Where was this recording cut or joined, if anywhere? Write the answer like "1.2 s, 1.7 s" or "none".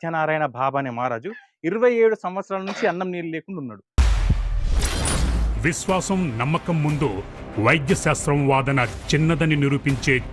none